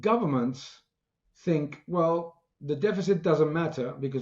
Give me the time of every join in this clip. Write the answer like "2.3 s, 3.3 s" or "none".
none